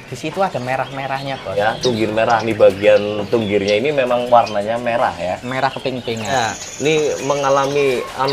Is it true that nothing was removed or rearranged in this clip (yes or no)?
no